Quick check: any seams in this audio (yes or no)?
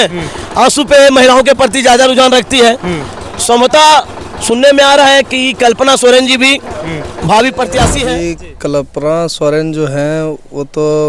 yes